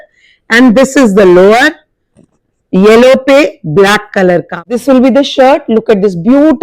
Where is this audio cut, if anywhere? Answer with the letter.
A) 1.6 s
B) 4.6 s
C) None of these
B